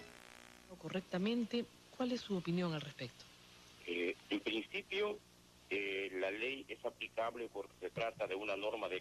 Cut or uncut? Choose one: cut